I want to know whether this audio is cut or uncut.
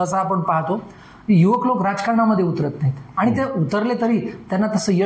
uncut